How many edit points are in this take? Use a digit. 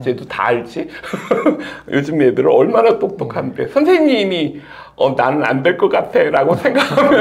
0